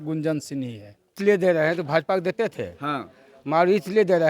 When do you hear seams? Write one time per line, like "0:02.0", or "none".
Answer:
0:01.2